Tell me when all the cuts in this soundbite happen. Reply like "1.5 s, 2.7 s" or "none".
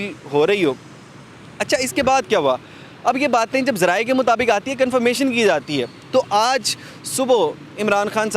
none